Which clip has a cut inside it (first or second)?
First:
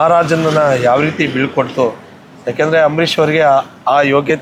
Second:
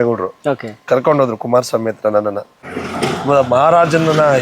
second